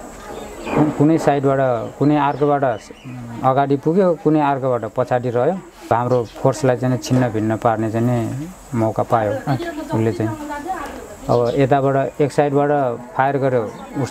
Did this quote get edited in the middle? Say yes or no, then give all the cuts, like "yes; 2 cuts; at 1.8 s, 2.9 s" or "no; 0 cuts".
yes; 1 cut; at 5.9 s